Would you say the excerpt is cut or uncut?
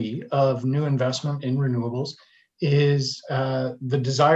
uncut